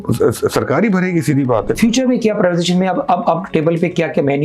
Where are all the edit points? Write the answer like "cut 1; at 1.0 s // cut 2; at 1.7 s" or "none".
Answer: cut 1; at 1.7 s